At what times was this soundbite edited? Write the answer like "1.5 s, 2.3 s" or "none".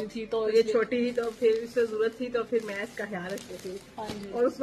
none